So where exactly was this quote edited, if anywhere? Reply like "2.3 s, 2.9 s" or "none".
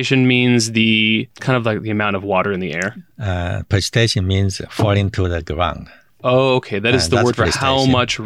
1.3 s